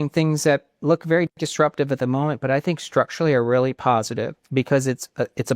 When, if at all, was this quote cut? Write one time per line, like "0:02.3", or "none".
0:04.4